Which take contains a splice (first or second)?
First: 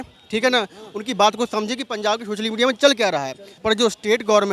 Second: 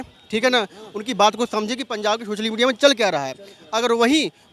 first